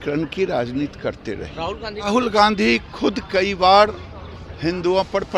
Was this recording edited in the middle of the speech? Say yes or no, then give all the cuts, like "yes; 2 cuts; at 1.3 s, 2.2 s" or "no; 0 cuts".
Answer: yes; 1 cut; at 2.1 s